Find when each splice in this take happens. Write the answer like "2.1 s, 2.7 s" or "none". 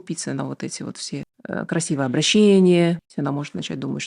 1.3 s, 3.1 s